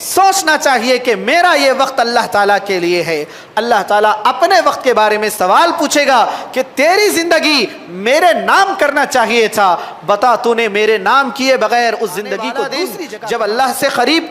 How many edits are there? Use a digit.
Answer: 1